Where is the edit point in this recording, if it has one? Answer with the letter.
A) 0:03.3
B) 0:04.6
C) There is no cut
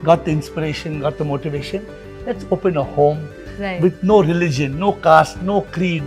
C